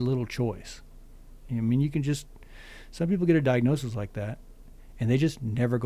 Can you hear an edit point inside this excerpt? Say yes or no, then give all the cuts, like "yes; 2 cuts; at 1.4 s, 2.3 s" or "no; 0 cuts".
no; 0 cuts